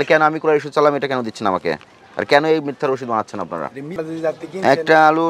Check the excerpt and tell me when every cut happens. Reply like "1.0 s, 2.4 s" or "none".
none